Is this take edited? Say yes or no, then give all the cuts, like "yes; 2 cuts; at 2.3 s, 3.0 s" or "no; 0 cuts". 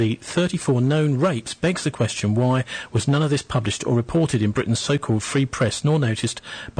yes; 1 cut; at 2.8 s